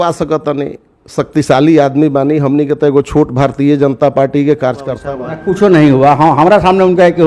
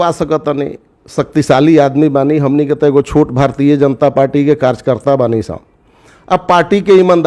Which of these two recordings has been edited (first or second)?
first